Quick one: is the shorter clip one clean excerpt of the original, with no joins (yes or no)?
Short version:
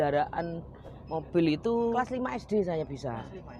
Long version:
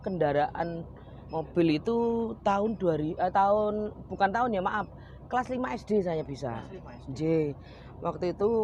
no